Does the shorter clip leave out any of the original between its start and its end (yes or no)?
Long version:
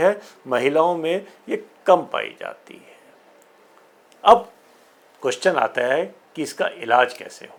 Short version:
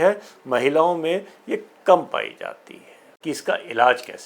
yes